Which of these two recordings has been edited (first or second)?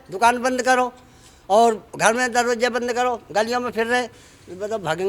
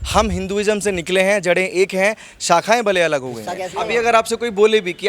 second